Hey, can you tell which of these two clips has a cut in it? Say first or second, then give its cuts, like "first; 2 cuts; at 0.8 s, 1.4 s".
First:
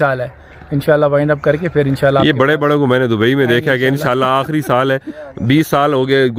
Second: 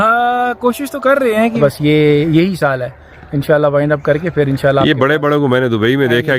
second; 1 cut; at 1.6 s